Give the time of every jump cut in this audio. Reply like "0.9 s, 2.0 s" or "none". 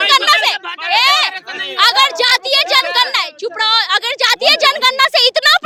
none